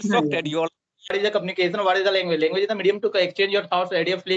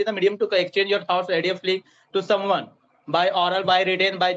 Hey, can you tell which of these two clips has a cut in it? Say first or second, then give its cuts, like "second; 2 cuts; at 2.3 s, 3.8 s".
first; 1 cut; at 1.1 s